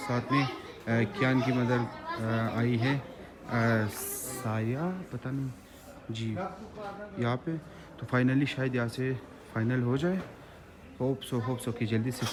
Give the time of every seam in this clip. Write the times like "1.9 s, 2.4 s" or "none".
none

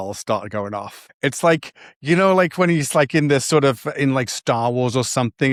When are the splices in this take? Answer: none

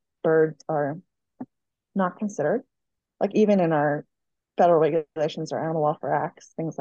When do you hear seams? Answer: none

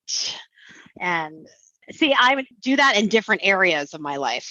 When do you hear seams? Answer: 2.5 s

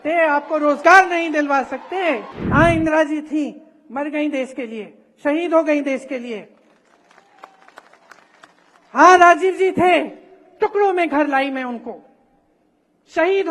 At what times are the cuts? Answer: 2.3 s

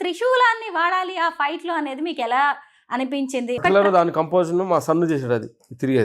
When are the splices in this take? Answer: 3.6 s

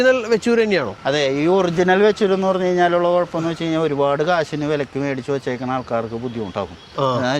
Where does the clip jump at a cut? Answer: 0.9 s

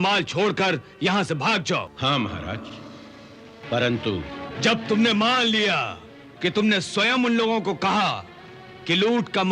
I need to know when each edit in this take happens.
1.9 s, 3.6 s

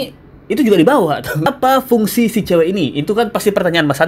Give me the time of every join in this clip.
1.5 s

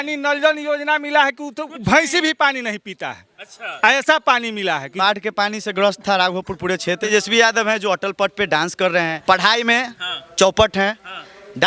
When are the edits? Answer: 4.9 s, 7.1 s, 9.2 s

